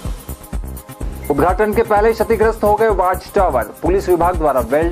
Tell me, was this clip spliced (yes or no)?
yes